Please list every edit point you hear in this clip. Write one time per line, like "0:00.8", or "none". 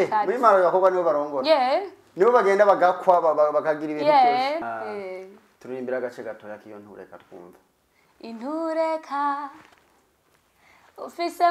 0:04.6